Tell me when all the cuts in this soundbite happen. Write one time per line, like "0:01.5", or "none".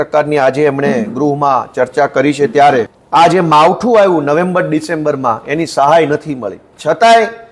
0:03.0

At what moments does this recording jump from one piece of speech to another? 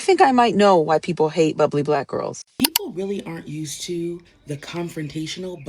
0:02.4

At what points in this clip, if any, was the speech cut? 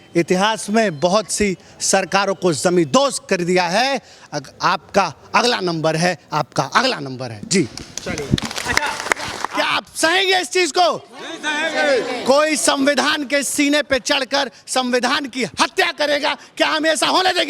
0:09.4

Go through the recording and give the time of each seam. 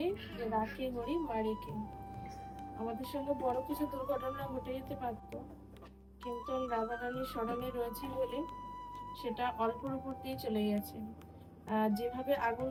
none

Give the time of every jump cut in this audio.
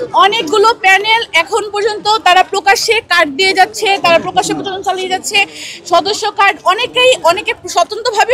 none

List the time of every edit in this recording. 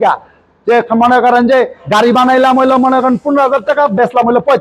none

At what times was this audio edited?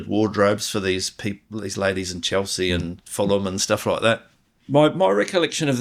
0:04.3

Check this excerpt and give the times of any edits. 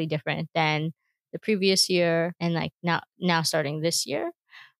0:02.4

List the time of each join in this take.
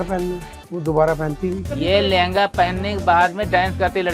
0:01.6

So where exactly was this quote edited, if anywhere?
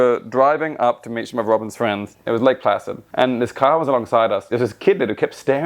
0:02.1
0:03.0
0:04.5

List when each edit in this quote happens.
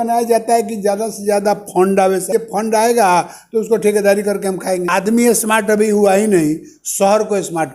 0:02.3
0:04.9

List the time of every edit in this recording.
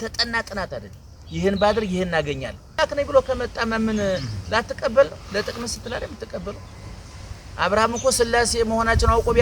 0:02.8

